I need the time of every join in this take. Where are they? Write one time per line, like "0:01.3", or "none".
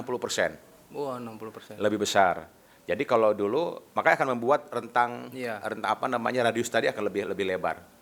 none